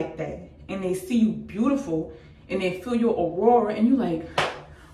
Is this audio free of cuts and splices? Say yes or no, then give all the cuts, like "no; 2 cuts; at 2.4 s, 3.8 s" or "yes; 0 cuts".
yes; 0 cuts